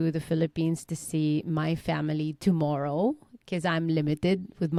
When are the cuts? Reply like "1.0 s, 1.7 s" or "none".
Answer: none